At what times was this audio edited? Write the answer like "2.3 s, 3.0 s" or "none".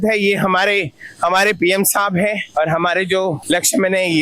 none

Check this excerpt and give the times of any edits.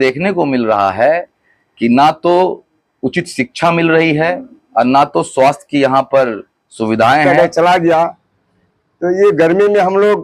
7.3 s

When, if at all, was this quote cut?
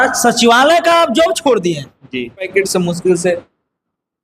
2.5 s

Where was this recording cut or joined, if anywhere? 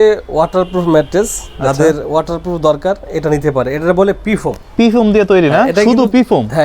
none

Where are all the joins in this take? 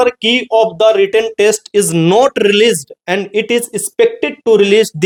none

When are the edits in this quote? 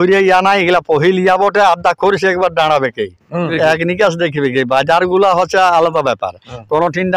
3.5 s

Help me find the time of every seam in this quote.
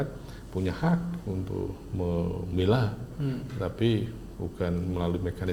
none

